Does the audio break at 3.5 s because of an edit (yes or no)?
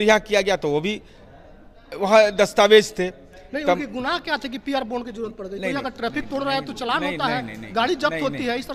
no